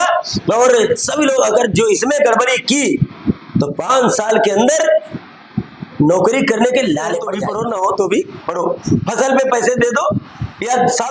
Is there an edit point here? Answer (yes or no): yes